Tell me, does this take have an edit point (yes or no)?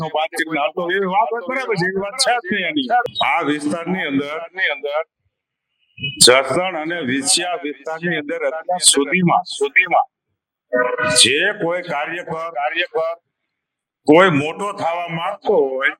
yes